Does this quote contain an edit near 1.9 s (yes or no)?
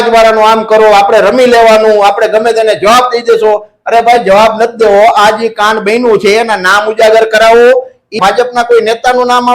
no